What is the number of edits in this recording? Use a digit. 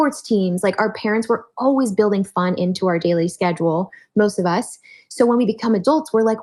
0